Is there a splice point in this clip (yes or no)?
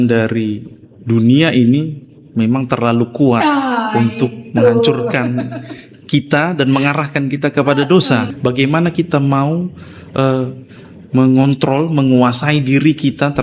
yes